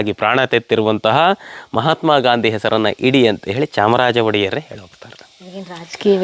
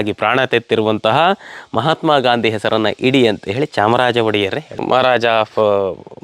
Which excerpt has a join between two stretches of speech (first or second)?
second